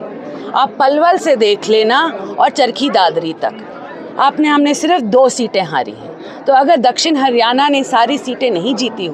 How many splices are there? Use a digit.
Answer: 0